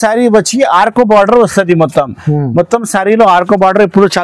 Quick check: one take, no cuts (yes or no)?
yes